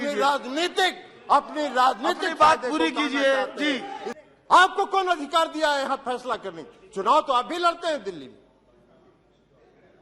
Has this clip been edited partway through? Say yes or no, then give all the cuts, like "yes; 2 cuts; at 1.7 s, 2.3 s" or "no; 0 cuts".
yes; 1 cut; at 4.0 s